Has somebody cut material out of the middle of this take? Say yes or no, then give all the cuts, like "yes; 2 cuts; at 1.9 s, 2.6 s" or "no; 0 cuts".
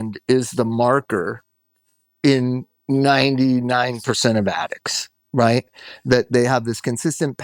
no; 0 cuts